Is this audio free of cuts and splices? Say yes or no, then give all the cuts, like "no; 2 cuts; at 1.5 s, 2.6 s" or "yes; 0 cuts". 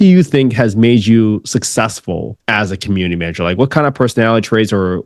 no; 1 cut; at 2.3 s